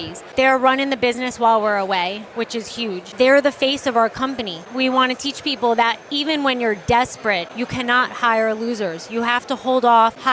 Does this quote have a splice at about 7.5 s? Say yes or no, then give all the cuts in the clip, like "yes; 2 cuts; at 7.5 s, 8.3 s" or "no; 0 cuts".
yes; 1 cut; at 7.5 s